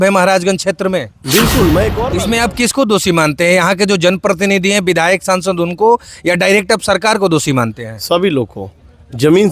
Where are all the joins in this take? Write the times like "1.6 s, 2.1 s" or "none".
2.1 s